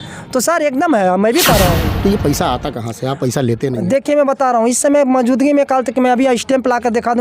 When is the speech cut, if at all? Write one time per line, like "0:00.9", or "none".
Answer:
0:01.9